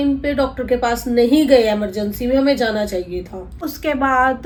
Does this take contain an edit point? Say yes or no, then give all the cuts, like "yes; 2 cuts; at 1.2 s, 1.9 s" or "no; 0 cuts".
no; 0 cuts